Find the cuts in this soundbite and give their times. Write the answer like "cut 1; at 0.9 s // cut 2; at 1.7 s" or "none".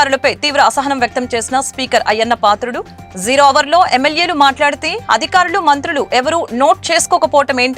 none

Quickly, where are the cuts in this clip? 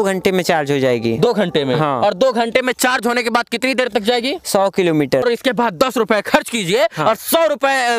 cut 1; at 5.2 s

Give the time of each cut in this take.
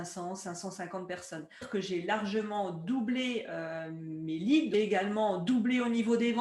cut 1; at 1.7 s // cut 2; at 4.7 s

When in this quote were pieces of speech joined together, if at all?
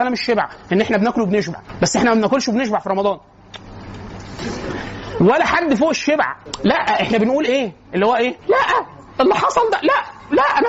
none

